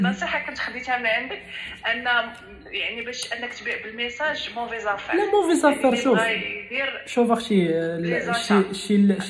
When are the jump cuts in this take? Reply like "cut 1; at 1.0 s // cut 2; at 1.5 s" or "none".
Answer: none

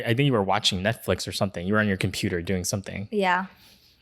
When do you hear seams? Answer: none

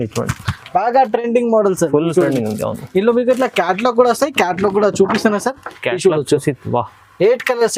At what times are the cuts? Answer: none

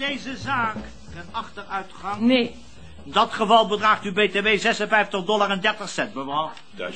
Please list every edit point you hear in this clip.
cut 1; at 1.1 s

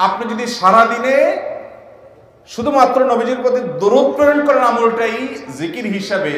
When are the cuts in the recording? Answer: none

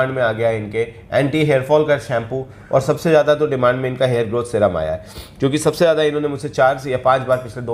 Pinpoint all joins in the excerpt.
none

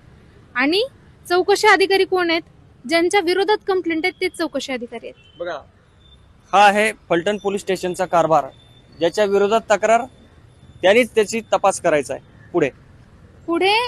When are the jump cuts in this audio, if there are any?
none

